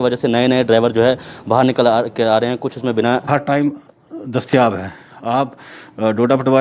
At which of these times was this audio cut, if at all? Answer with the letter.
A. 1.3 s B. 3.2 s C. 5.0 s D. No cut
B